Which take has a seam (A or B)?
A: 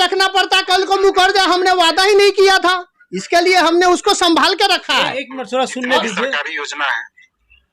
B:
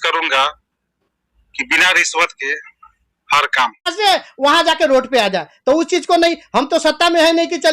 B